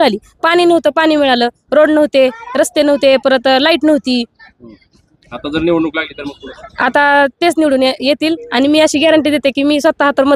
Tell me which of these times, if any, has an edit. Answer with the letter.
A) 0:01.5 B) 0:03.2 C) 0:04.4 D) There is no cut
D